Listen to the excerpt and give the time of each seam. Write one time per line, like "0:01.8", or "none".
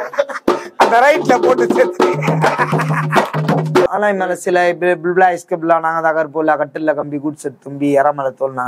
0:03.9